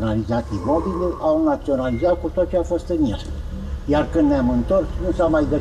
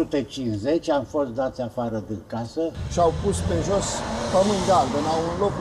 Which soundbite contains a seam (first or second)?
second